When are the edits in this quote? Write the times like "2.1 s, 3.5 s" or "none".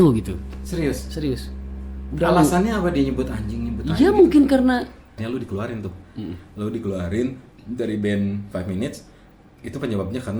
5.1 s